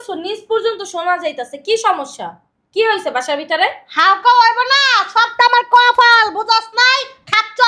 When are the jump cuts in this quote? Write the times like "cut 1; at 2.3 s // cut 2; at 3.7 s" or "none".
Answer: none